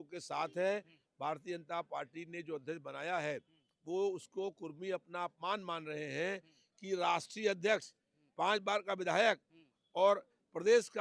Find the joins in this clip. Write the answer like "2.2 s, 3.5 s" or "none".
none